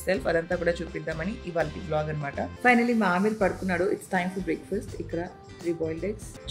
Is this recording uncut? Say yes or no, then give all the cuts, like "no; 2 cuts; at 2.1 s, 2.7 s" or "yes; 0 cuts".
no; 1 cut; at 2.5 s